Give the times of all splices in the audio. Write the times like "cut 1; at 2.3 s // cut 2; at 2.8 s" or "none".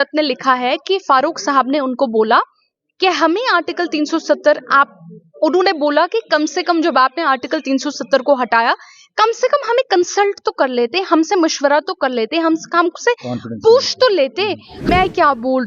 cut 1; at 14.7 s